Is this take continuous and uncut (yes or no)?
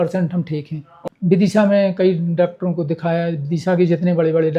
no